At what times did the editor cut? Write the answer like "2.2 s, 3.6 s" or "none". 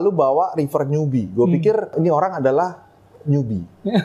1.9 s